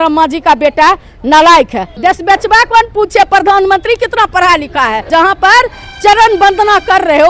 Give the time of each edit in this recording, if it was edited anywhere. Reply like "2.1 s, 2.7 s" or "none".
1.8 s, 5.1 s